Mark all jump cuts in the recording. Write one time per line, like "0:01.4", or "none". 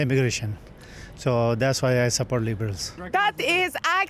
0:03.0